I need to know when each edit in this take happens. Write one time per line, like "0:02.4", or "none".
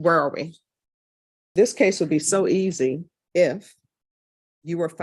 0:01.3